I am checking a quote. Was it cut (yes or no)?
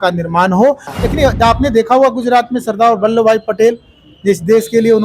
yes